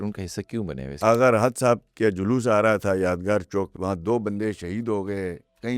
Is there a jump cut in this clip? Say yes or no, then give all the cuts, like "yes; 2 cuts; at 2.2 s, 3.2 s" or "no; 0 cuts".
yes; 2 cuts; at 1.0 s, 3.7 s